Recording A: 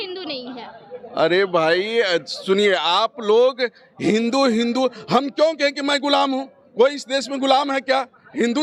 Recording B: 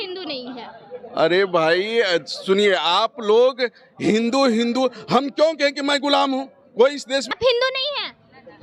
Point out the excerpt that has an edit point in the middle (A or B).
B